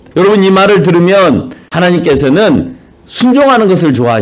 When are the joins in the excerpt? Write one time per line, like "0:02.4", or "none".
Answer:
0:01.6